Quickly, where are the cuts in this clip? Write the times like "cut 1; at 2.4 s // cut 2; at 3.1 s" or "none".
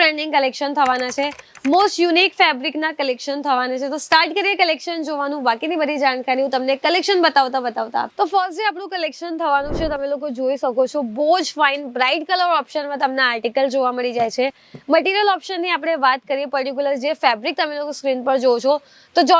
none